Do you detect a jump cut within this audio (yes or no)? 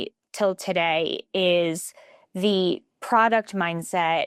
no